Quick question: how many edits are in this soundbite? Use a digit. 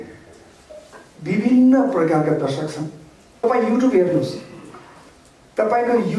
1